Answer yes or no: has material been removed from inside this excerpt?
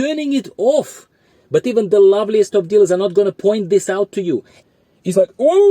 yes